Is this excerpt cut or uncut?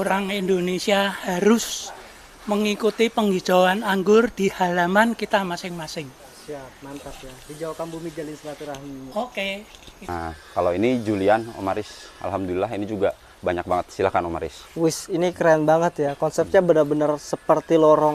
cut